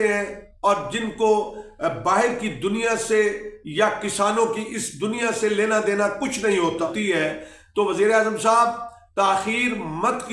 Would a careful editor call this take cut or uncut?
cut